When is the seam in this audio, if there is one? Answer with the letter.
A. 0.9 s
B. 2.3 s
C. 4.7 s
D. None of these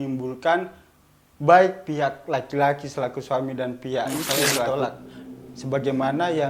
C